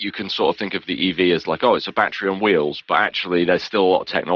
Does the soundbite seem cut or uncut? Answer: uncut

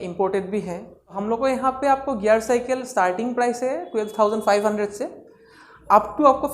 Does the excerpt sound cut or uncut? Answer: cut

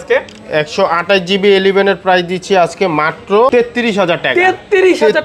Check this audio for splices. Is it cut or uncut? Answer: cut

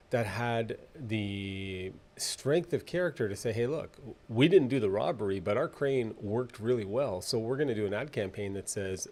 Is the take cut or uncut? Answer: uncut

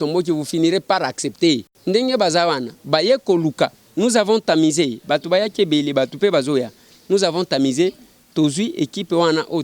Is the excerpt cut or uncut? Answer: cut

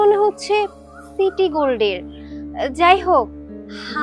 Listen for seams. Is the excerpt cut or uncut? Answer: uncut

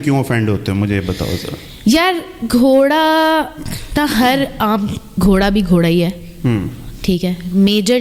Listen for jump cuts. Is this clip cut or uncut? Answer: uncut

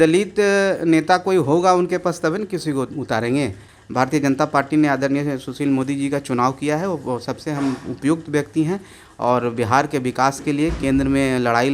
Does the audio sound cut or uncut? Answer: cut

